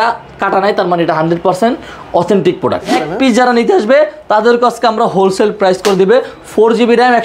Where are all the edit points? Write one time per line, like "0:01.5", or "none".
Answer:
0:02.9